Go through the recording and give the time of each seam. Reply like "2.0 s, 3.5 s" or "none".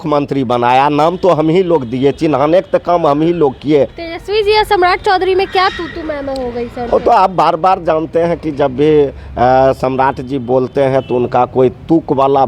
4.0 s